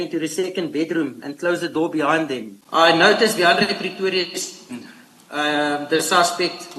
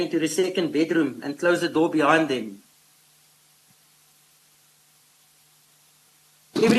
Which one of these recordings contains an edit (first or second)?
first